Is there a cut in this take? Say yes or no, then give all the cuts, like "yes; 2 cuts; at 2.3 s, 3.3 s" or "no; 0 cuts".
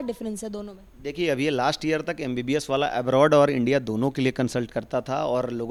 no; 0 cuts